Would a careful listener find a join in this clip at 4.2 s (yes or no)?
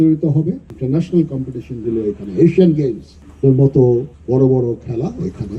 yes